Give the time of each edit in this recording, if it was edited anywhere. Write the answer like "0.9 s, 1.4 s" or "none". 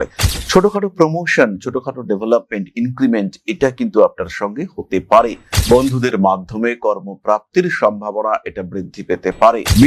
5.5 s